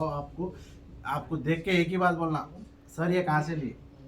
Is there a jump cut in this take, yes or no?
no